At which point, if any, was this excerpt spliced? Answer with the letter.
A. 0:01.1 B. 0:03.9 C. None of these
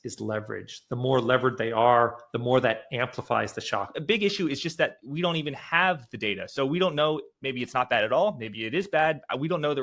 B